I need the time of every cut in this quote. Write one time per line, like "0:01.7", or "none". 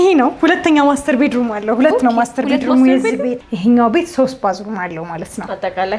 0:03.5